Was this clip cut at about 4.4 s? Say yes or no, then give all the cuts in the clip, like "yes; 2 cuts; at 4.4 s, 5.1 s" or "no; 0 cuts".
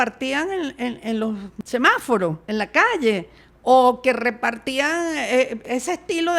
no; 3 cuts; at 1.5 s, 2.4 s, 5.6 s